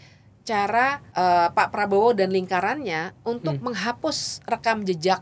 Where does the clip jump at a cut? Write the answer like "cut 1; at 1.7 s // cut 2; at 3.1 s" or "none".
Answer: cut 1; at 1.0 s

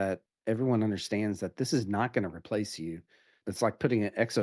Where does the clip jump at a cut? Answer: cut 1; at 3.4 s

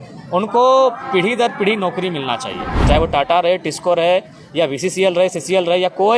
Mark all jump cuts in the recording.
cut 1; at 2.8 s

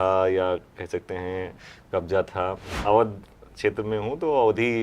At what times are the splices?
cut 1; at 2.7 s

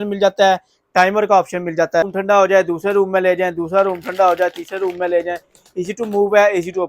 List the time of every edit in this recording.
cut 1; at 2.1 s

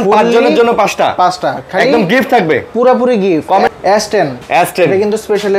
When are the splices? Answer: cut 1; at 3.7 s

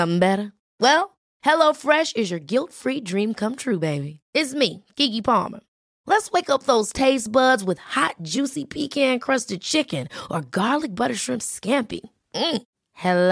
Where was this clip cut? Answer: none

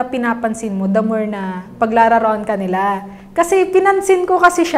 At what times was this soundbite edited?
none

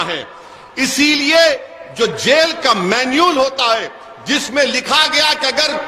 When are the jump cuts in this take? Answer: none

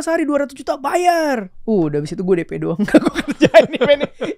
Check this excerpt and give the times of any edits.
cut 1; at 1.5 s

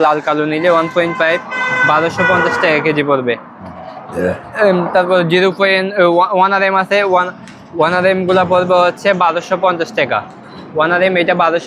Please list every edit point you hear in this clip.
none

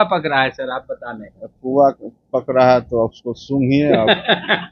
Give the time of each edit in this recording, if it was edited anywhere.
none

